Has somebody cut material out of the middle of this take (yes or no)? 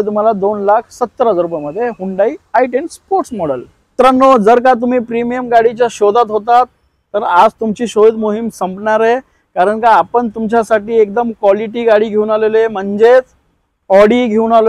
no